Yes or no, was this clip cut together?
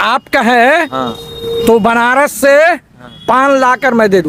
no